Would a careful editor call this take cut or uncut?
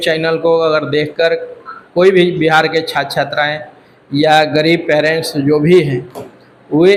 uncut